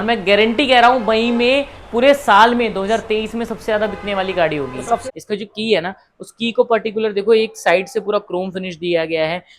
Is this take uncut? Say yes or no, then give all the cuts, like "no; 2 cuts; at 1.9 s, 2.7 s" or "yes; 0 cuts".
no; 1 cut; at 5.0 s